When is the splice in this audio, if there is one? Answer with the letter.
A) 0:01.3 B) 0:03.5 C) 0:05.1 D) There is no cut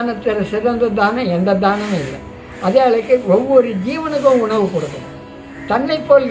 D